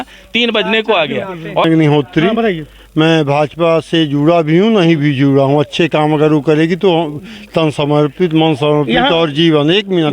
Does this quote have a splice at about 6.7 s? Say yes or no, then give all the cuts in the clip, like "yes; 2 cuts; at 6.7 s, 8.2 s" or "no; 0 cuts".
no; 1 cut; at 1.6 s